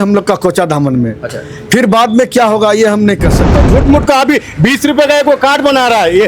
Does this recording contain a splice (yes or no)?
yes